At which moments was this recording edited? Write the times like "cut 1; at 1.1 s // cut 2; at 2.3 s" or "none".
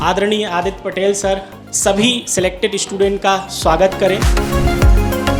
none